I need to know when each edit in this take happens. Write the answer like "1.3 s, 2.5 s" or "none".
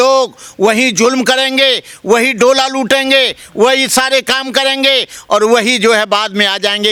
none